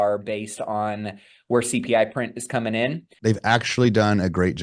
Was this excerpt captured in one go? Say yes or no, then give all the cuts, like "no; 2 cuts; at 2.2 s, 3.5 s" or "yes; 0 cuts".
no; 1 cut; at 3.1 s